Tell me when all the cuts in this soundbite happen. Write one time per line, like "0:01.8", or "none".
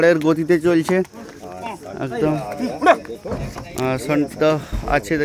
none